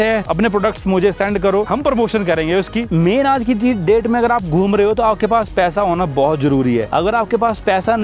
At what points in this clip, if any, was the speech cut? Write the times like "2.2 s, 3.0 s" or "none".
2.9 s